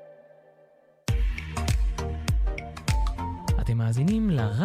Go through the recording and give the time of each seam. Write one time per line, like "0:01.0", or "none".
0:01.2